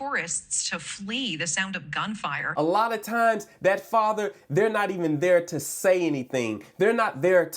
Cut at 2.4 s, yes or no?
yes